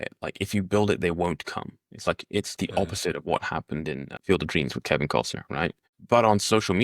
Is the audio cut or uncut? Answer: cut